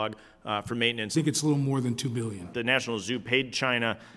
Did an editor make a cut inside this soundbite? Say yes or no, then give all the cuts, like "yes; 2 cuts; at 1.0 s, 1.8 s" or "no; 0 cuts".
yes; 2 cuts; at 1.1 s, 2.5 s